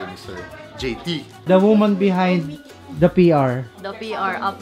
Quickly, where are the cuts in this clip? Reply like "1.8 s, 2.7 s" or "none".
1.4 s